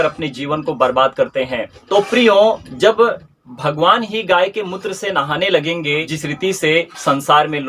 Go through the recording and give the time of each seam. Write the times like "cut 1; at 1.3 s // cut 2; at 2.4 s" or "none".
cut 1; at 6.1 s